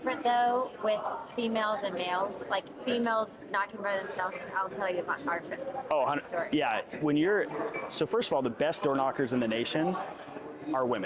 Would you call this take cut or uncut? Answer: uncut